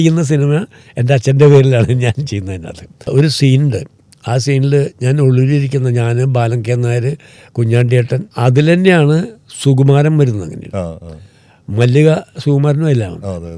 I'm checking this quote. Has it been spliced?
no; 0 cuts

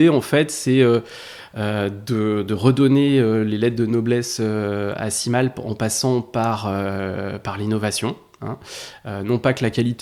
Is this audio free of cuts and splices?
yes; 0 cuts

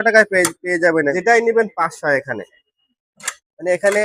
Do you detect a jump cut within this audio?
yes; 1 cut; at 1.1 s

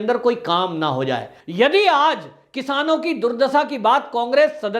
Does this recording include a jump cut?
yes; 1 cut; at 1.3 s

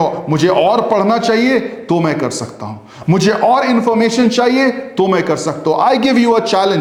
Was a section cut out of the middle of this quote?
no; 0 cuts

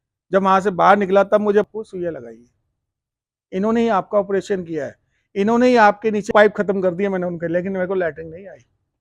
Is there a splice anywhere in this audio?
yes; 2 cuts; at 1.7 s, 6.3 s

